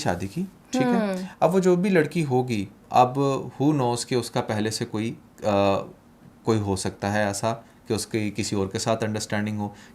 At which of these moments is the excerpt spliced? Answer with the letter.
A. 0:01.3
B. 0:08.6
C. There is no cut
A